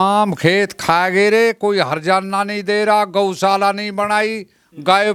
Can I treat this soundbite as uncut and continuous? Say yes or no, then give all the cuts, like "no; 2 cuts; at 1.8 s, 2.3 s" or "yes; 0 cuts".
yes; 0 cuts